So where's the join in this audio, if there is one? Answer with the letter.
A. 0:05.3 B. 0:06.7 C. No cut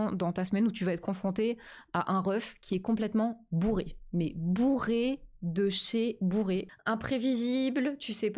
B